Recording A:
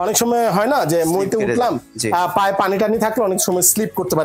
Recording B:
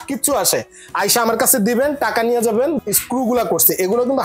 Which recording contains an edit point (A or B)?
B